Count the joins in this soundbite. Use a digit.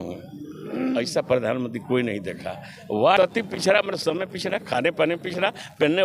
1